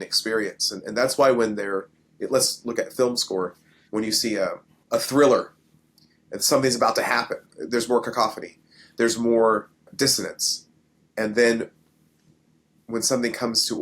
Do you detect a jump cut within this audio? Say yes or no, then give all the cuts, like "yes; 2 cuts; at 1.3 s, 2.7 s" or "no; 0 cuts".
yes; 3 cuts; at 4.7 s, 7.6 s, 9.8 s